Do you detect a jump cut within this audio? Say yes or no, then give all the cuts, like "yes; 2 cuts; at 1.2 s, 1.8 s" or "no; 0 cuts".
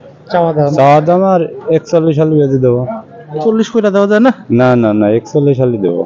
no; 0 cuts